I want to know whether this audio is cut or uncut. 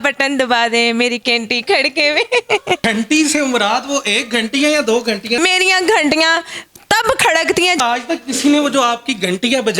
cut